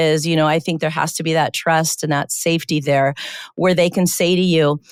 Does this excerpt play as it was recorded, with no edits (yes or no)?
yes